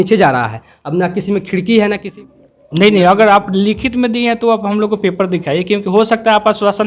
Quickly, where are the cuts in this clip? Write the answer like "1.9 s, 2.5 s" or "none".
2.0 s